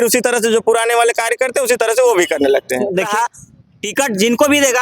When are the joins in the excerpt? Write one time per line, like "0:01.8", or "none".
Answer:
0:03.1